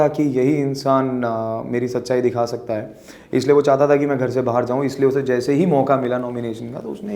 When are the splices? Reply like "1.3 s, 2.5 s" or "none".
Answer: none